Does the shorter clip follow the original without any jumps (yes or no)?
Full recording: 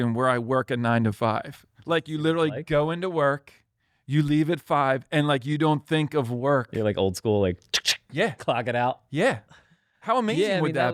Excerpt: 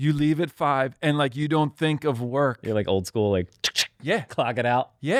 yes